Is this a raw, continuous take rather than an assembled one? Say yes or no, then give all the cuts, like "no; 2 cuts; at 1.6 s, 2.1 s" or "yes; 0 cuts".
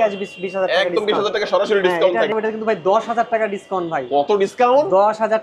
no; 1 cut; at 2.3 s